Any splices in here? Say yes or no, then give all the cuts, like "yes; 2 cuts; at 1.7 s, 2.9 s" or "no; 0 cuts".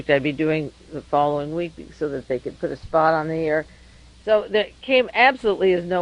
yes; 1 cut; at 1.6 s